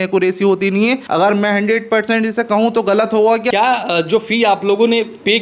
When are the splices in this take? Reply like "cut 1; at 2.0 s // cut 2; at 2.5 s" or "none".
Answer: cut 1; at 1.0 s // cut 2; at 3.5 s

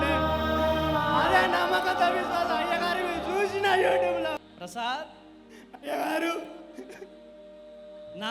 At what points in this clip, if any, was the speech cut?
cut 1; at 4.4 s

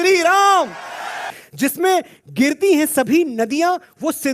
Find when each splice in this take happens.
cut 1; at 1.2 s

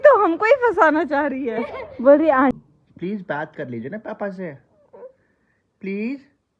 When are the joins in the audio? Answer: cut 1; at 2.5 s

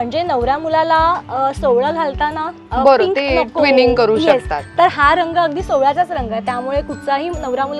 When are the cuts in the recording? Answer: none

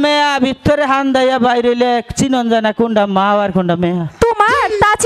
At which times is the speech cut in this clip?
none

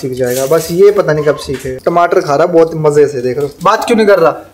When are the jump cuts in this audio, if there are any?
cut 1; at 1.7 s // cut 2; at 3.5 s

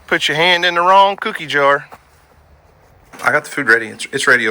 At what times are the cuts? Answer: cut 1; at 3.1 s

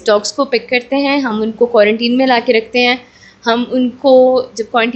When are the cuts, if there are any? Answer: none

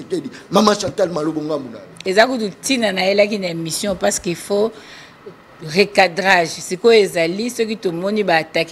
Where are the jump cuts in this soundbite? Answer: cut 1; at 2.0 s

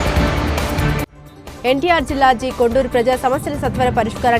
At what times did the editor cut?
cut 1; at 1.0 s

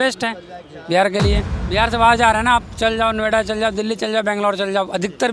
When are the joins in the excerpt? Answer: cut 1; at 1.5 s

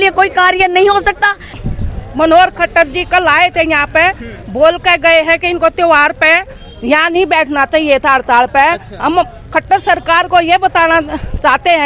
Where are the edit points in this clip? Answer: cut 1; at 1.5 s

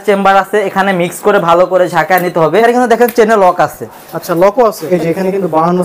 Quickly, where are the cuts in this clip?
cut 1; at 2.6 s // cut 2; at 4.8 s

